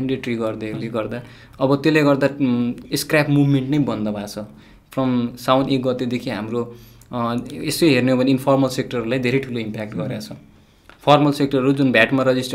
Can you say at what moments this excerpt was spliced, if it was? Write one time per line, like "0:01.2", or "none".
none